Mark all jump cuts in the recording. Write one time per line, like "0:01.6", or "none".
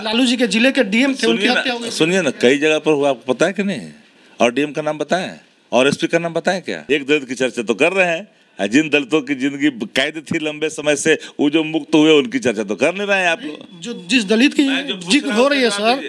0:06.7